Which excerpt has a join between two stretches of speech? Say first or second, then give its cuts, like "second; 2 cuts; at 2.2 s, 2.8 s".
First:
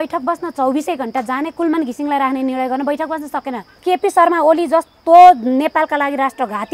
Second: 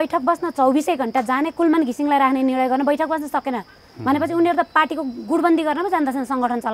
first; 1 cut; at 3.8 s